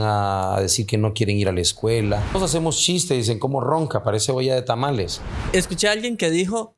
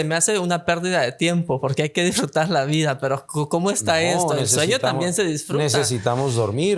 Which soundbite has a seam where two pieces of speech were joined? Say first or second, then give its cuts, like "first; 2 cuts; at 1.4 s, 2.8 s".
first; 2 cuts; at 2.4 s, 5.4 s